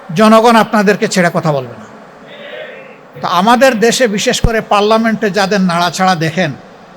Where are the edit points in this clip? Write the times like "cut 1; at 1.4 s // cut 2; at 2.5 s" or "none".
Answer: cut 1; at 3.1 s